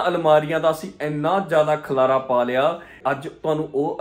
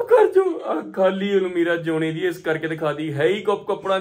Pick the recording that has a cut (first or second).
first